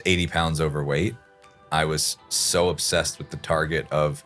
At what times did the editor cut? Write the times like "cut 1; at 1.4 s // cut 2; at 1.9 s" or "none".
none